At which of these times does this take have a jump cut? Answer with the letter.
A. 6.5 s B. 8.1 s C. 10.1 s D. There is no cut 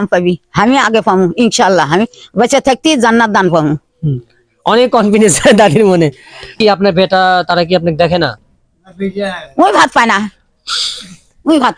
A